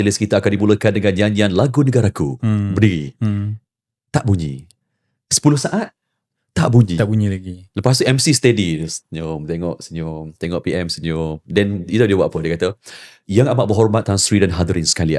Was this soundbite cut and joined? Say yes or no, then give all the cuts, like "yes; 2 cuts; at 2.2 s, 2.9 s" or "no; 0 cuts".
no; 0 cuts